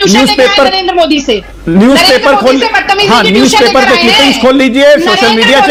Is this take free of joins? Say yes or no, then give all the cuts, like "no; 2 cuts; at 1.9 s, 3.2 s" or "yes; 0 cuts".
yes; 0 cuts